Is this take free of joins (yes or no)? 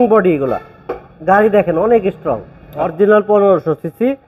no